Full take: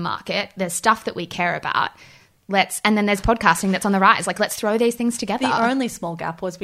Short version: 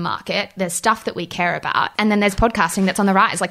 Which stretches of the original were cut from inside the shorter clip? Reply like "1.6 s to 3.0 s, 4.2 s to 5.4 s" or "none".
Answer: 1.9 s to 2.8 s